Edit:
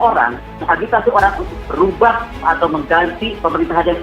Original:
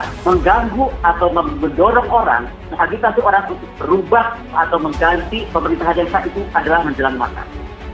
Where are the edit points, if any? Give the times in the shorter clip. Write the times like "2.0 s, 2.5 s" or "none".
none